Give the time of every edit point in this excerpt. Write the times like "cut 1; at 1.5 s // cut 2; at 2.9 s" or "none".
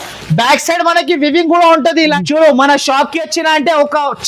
cut 1; at 2.2 s